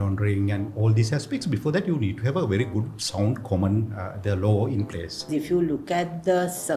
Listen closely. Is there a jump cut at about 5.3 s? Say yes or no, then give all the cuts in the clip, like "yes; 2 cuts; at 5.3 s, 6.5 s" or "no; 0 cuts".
yes; 1 cut; at 5.3 s